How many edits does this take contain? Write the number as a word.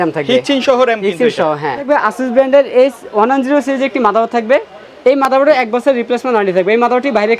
one